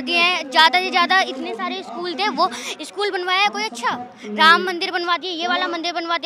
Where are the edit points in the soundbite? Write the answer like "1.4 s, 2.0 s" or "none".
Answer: none